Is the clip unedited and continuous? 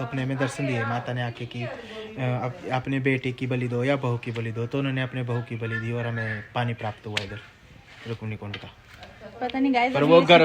yes; 0 cuts

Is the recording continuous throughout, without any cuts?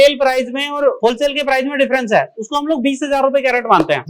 yes; 0 cuts

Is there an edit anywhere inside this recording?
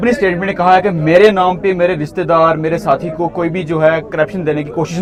no; 0 cuts

